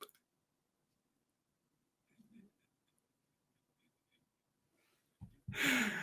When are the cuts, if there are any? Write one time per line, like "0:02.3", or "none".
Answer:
none